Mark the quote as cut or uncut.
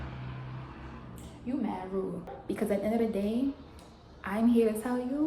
cut